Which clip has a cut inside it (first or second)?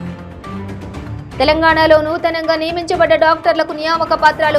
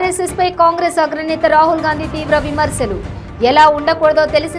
first